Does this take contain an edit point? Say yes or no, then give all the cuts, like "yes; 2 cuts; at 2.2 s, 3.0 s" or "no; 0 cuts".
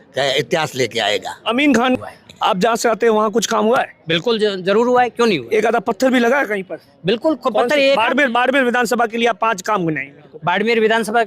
yes; 1 cut; at 2.0 s